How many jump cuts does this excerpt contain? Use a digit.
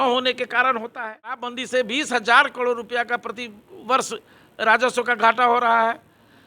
1